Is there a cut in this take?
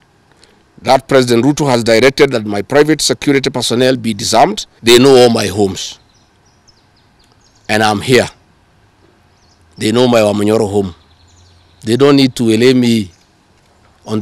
yes; 1 cut; at 4.7 s

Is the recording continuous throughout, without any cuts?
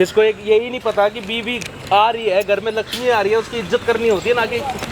yes; 0 cuts

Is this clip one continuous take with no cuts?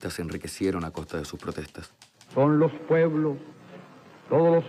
no; 1 cut; at 1.1 s

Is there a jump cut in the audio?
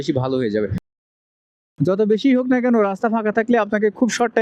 yes; 1 cut; at 1.4 s

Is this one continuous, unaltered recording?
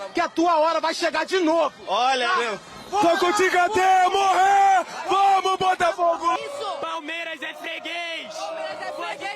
no; 1 cut; at 6.4 s

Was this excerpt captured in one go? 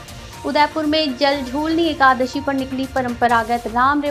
yes; 0 cuts

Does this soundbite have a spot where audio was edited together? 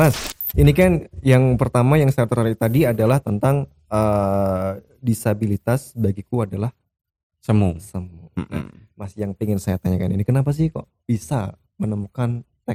no; 0 cuts

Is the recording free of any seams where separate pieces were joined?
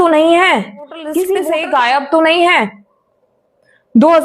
no; 1 cut; at 1.4 s

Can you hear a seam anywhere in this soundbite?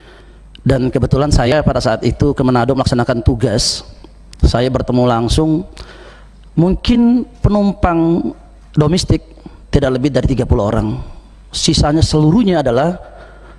yes; 1 cut; at 1.5 s

